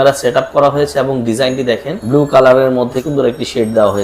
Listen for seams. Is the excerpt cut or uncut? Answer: cut